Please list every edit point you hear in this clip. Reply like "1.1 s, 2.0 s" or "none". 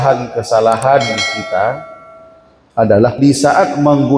3.2 s